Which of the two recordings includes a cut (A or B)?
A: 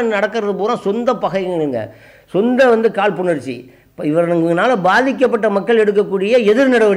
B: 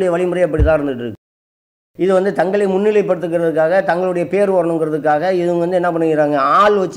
B